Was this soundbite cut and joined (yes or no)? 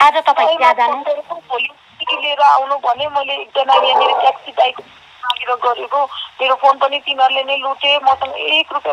no